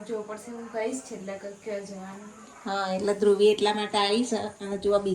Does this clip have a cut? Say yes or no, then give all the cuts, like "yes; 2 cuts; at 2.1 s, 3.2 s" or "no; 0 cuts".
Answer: no; 0 cuts